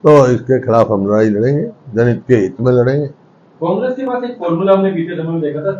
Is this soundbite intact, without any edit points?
yes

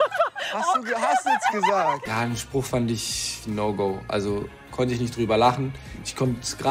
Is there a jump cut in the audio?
yes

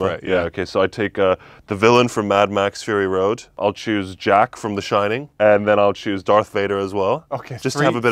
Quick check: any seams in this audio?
yes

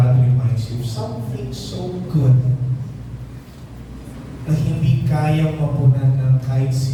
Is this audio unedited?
yes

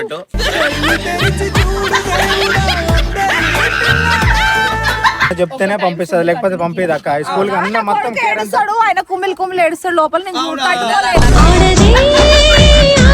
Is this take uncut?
no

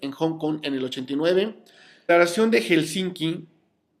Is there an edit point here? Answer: no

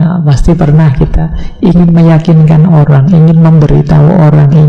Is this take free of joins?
yes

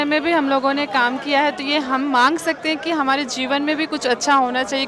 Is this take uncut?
yes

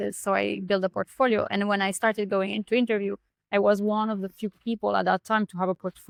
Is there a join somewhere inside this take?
no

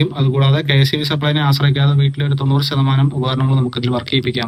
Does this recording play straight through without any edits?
yes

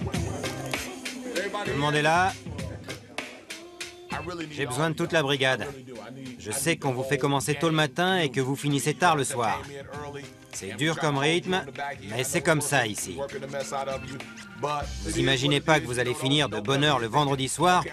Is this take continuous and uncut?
no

